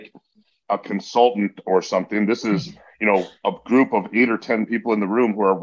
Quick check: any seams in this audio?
no; 0 cuts

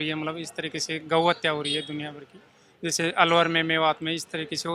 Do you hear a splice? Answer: no; 0 cuts

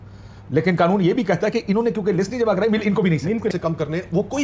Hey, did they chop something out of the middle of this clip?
yes; 1 cut; at 3.5 s

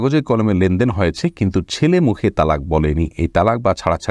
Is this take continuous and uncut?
yes; 0 cuts

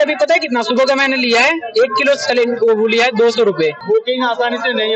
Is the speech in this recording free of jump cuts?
no; 1 cut; at 3.8 s

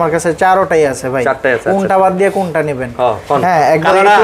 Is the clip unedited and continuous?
yes; 0 cuts

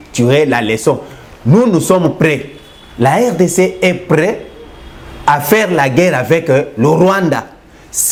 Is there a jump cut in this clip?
no; 0 cuts

